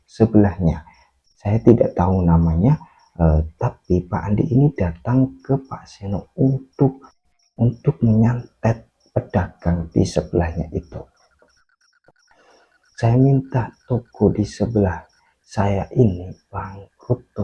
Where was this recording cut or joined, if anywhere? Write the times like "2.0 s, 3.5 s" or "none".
12.2 s